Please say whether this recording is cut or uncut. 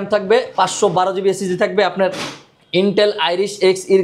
uncut